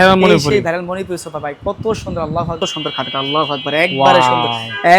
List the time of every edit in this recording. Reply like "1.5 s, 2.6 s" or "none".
2.6 s